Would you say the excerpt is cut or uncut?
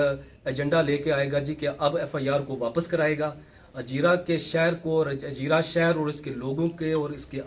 uncut